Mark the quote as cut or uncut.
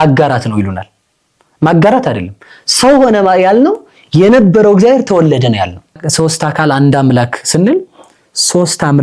cut